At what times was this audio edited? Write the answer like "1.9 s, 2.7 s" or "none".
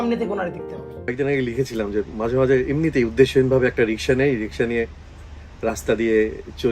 1.1 s